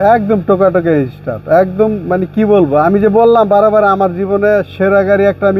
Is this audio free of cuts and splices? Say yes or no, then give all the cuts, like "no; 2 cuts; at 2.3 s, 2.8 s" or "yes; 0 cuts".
yes; 0 cuts